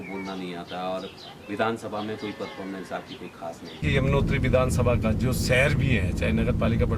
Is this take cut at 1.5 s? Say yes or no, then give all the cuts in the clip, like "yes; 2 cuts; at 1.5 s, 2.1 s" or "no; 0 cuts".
no; 1 cut; at 3.8 s